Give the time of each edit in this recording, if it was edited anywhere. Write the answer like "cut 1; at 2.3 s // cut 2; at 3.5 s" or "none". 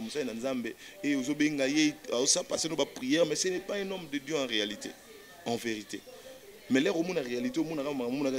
none